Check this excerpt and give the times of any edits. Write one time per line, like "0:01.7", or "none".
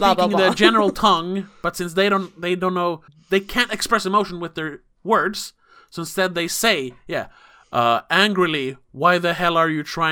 0:03.1